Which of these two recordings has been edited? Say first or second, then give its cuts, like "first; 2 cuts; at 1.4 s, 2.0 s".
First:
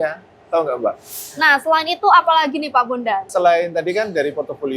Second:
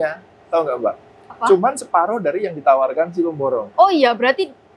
first; 1 cut; at 1.2 s